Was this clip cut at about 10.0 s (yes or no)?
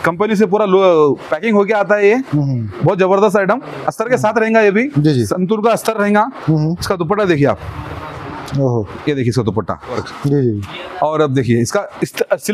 yes